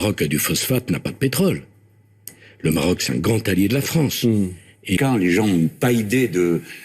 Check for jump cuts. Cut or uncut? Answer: cut